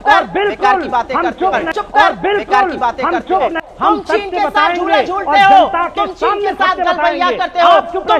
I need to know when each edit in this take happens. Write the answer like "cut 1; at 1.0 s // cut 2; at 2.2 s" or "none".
none